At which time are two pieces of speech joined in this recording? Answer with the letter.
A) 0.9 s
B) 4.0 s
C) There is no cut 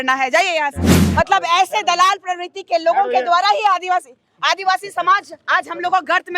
A